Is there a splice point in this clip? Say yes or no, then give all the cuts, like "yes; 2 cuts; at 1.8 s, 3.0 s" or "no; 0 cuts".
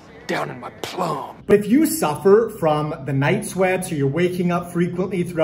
yes; 1 cut; at 1.5 s